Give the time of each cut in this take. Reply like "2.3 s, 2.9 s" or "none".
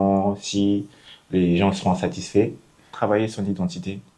2.9 s

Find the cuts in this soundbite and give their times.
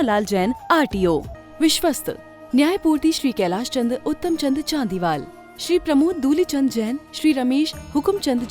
1.4 s

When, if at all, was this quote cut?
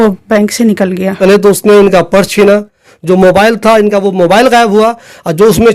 1.2 s

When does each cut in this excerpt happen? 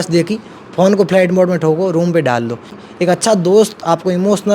2.8 s

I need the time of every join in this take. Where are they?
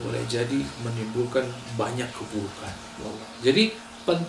3.0 s

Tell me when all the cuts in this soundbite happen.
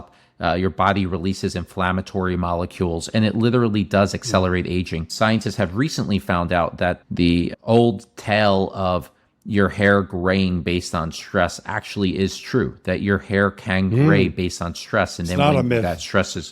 5.0 s

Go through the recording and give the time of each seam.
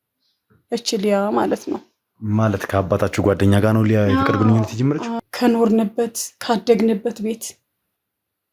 5.2 s

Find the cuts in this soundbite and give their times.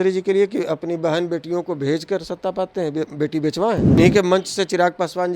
4.0 s

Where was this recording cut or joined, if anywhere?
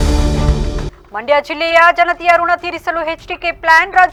none

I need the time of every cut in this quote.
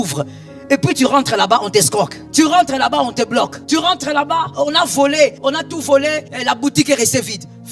2.2 s, 3.6 s, 4.5 s, 5.4 s, 6.3 s

